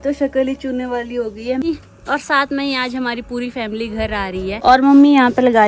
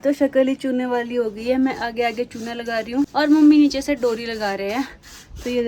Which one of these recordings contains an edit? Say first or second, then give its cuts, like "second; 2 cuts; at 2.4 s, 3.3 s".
first; 2 cuts; at 1.6 s, 4.6 s